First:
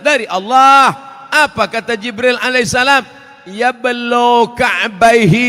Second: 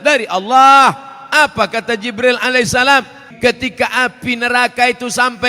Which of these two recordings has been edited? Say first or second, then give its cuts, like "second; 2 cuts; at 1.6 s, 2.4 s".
second; 1 cut; at 3.2 s